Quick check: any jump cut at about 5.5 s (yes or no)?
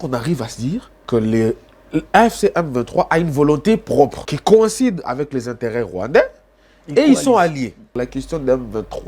no